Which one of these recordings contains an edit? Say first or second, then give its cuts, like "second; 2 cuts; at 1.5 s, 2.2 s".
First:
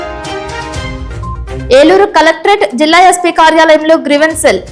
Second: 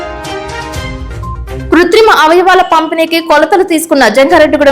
second; 1 cut; at 1.0 s